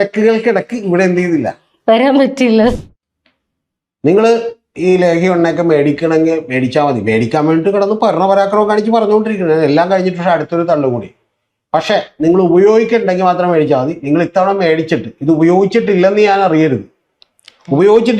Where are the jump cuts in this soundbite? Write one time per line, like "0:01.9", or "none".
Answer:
0:02.8

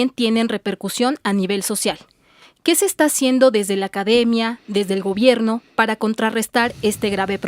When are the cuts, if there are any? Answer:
0:03.4

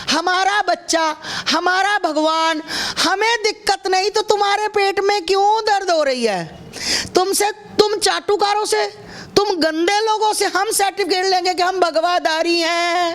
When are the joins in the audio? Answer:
none

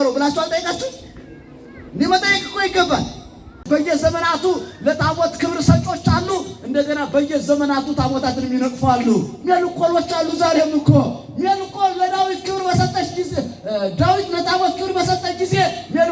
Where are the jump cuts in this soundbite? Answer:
0:03.6

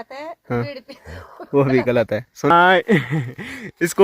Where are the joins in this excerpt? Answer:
0:02.5

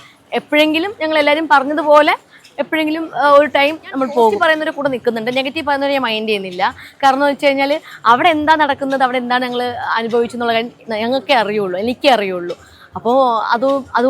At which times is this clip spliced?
0:04.4

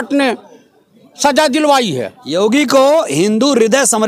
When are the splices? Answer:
none

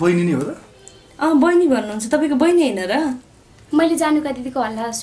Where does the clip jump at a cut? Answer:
none

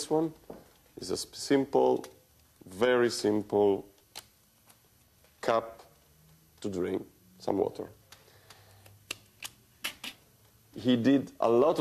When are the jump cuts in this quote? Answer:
none

